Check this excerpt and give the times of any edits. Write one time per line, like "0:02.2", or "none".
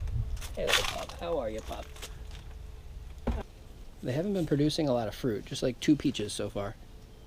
0:03.4